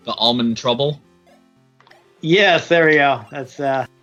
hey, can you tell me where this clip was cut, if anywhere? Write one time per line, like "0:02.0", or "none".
none